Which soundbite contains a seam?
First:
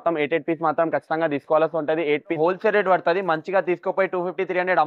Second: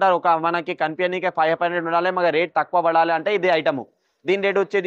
first; 1 cut; at 2.4 s

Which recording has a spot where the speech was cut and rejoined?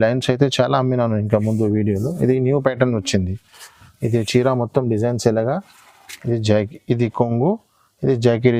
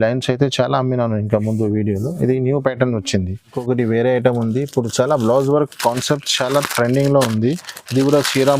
second; 1 cut; at 3.5 s

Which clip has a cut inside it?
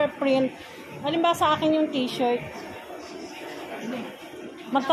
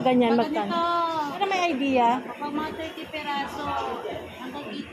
second; 1 cut; at 1.4 s

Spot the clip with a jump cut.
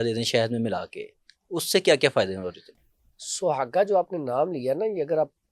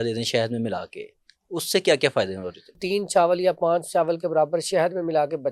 second; 1 cut; at 2.8 s

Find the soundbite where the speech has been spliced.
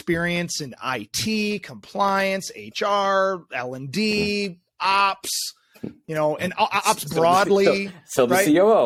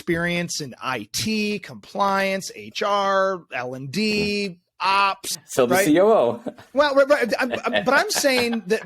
second; 1 cut; at 5.4 s

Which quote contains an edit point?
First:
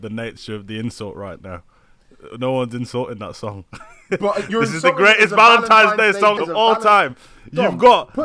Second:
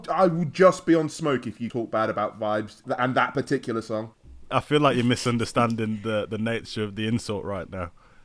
second; 3 cuts; at 1.6 s, 2.8 s, 4.5 s

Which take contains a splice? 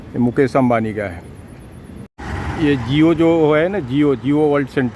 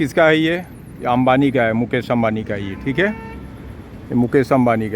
first; 1 cut; at 2.1 s

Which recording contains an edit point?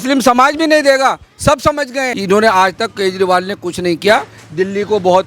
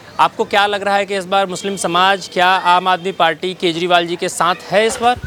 first; 1 cut; at 2.1 s

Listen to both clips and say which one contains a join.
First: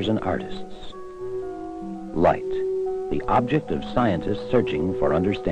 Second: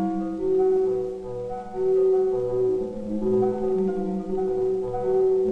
first; 1 cut; at 4.4 s

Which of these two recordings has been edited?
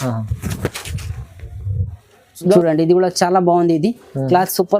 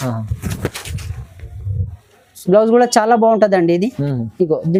first; 1 cut; at 2.3 s

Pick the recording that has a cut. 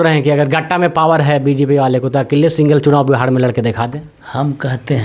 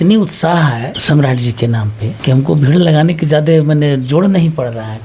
second; 2 cuts; at 0.9 s, 2.1 s

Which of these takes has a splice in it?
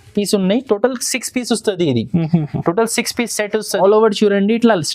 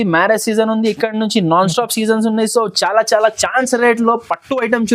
first; 1 cut; at 3.8 s

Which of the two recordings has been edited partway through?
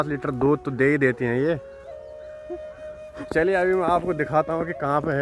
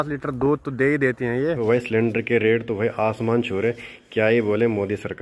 second; 1 cut; at 1.6 s

